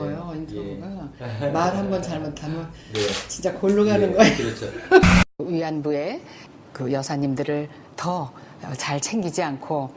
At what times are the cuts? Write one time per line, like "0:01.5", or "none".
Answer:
0:05.7